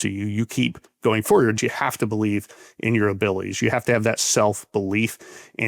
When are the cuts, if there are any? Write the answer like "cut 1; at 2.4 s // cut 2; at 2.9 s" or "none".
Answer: cut 1; at 1.6 s